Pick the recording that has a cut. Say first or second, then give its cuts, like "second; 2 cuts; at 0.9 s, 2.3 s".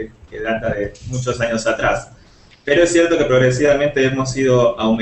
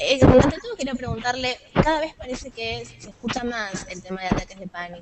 first; 1 cut; at 3.2 s